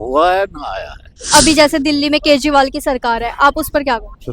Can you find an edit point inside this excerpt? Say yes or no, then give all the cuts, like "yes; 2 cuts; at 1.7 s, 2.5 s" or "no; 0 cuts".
yes; 1 cut; at 1.2 s